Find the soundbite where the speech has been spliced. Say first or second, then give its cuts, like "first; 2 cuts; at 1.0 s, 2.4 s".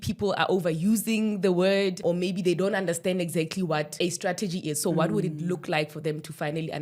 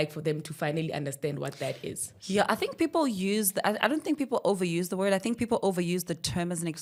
first; 2 cuts; at 2.0 s, 3.9 s